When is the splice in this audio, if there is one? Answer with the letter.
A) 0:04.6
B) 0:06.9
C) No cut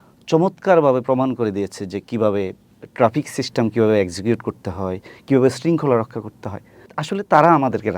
B